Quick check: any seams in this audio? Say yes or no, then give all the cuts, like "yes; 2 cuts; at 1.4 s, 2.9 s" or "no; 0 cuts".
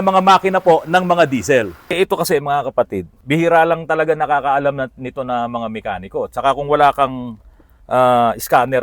yes; 2 cuts; at 2.0 s, 3.2 s